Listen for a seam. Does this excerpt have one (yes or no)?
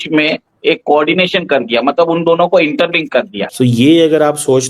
yes